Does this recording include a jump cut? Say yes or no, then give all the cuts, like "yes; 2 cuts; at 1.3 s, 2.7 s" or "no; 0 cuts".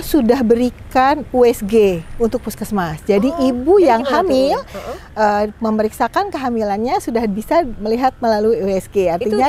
no; 0 cuts